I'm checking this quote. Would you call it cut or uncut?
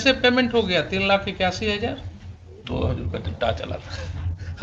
uncut